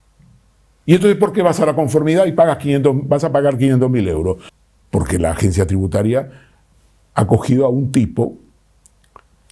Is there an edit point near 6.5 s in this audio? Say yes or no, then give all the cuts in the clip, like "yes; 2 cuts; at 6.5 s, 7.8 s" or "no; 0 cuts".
no; 1 cut; at 4.5 s